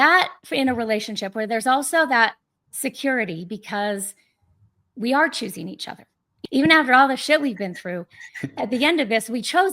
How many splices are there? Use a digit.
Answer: 1